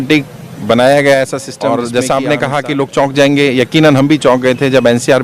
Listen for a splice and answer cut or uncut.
cut